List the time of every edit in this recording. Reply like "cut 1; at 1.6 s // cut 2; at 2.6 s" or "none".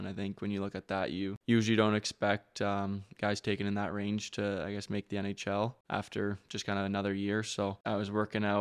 cut 1; at 1.4 s // cut 2; at 5.8 s // cut 3; at 7.8 s